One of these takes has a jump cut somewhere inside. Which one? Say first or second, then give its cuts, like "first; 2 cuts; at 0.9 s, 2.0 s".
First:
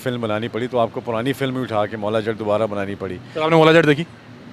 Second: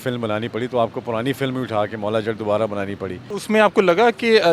second; 1 cut; at 3.2 s